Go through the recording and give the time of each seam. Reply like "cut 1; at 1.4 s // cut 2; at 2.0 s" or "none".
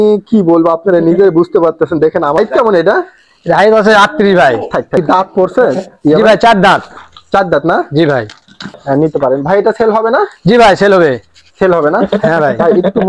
cut 1; at 2.4 s // cut 2; at 5.0 s // cut 3; at 8.8 s